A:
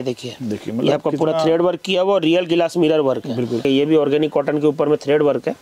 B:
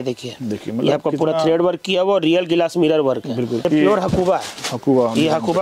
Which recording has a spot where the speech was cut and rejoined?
B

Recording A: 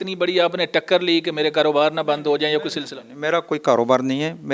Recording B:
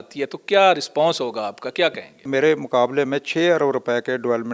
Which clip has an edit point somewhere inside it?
B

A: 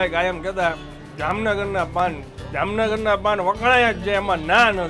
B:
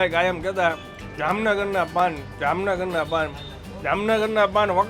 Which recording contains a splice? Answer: A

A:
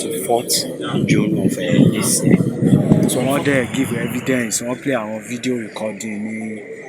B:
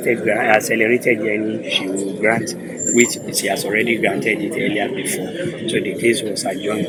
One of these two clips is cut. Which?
A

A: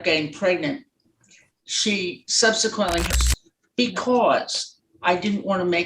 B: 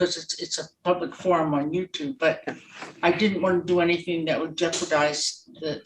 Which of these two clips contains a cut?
A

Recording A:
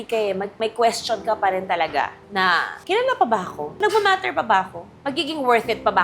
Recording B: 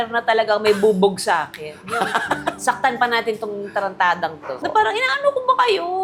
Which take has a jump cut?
A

